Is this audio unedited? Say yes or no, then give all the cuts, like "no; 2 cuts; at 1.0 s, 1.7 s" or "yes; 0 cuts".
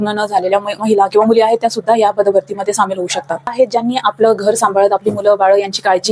no; 1 cut; at 3.5 s